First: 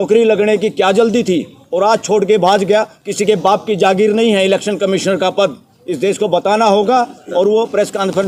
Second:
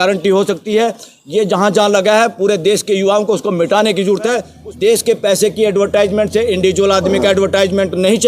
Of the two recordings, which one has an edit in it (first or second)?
second